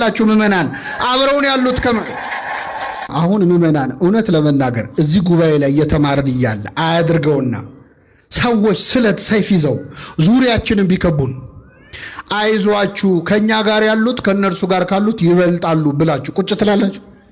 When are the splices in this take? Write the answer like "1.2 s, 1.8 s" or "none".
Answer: 3.1 s